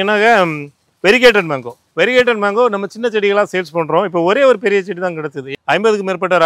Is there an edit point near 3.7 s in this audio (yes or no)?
no